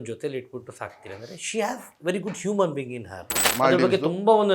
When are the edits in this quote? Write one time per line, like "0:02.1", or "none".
0:03.4